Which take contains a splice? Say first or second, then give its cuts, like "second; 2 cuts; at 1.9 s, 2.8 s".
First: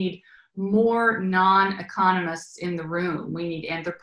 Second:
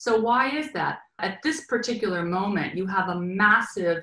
second; 1 cut; at 1.2 s